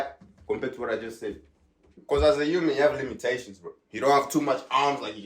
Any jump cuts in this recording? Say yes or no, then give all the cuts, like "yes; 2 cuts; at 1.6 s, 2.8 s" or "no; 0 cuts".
yes; 1 cut; at 2.0 s